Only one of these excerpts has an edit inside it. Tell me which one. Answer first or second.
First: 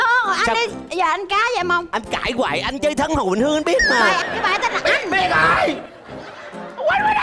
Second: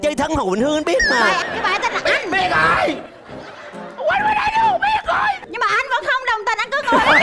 second